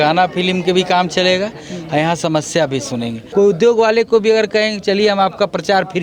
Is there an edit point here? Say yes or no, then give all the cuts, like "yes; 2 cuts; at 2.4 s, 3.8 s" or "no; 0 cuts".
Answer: yes; 1 cut; at 3.2 s